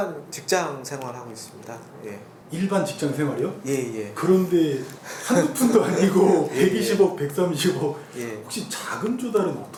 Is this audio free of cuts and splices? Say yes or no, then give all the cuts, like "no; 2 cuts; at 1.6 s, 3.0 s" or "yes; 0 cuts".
yes; 0 cuts